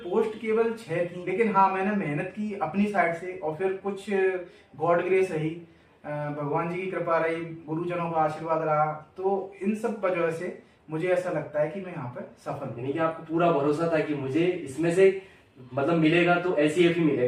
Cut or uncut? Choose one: cut